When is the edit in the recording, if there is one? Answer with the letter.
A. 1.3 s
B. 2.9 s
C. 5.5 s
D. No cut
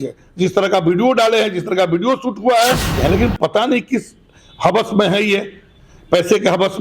B